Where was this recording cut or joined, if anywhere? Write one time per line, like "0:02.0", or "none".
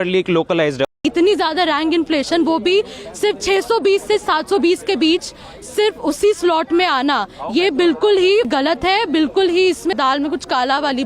0:00.9
0:08.5
0:09.9